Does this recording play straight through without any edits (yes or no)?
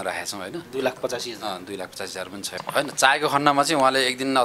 no